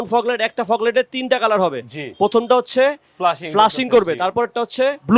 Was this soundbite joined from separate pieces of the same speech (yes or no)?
no